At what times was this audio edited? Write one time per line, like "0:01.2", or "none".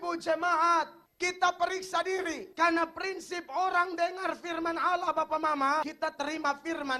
0:02.4
0:05.9